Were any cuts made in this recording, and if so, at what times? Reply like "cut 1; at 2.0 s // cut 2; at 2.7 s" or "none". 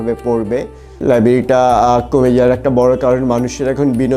cut 1; at 1.0 s